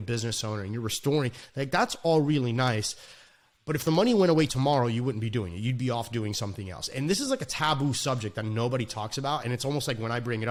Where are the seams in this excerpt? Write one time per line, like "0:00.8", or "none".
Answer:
none